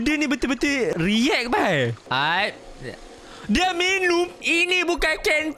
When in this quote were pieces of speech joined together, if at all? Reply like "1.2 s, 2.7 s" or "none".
0.9 s, 2.0 s, 4.3 s